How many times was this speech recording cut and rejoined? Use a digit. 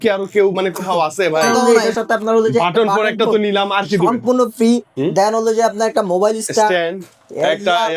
1